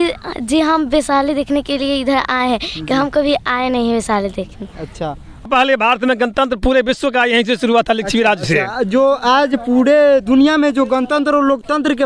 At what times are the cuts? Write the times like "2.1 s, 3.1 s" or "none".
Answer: 5.5 s